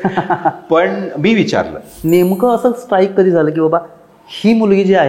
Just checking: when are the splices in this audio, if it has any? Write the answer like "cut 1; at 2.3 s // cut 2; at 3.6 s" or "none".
cut 1; at 1.8 s